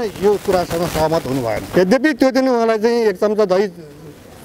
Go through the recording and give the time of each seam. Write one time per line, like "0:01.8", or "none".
0:01.6